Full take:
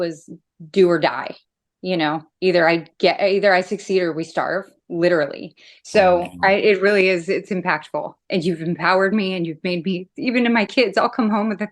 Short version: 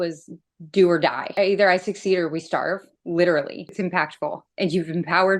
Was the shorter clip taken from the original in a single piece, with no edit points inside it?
no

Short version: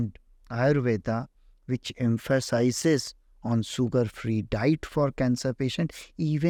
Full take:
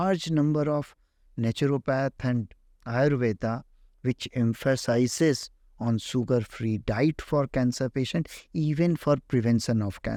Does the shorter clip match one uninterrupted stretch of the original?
yes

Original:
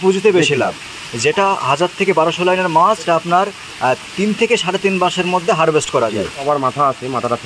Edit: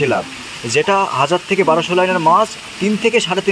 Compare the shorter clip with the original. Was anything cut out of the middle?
yes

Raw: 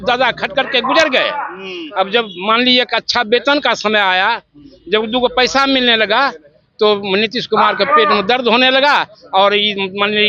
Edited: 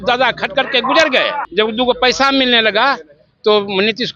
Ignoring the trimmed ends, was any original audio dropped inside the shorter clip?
yes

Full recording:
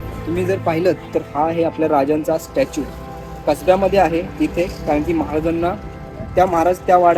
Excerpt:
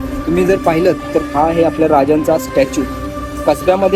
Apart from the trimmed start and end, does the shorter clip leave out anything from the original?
no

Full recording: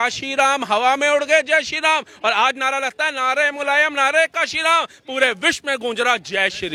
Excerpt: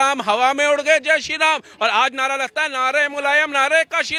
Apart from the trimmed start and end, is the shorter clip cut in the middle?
no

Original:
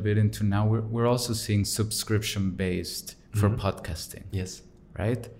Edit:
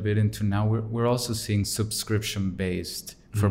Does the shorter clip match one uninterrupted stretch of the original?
yes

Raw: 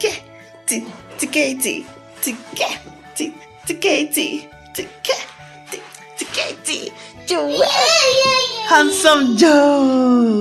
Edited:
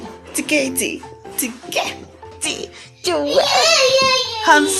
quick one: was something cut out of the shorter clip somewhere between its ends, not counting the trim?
yes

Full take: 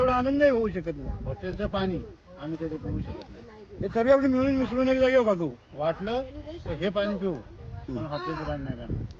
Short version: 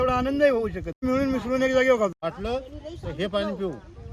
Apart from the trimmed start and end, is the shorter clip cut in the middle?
yes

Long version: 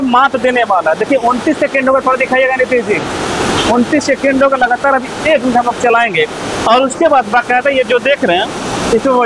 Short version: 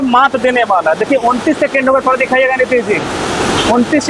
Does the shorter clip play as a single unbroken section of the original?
yes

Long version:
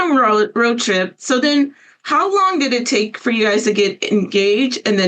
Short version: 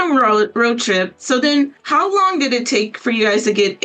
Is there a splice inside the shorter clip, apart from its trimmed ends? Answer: yes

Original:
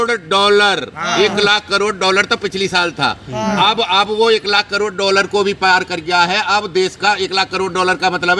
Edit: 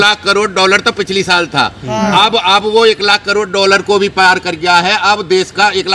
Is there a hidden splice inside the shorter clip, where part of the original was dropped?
no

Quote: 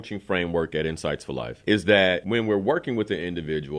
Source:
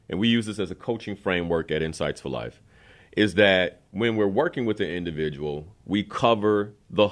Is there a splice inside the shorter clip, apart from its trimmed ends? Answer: yes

